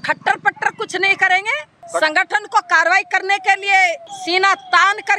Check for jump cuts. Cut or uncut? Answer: cut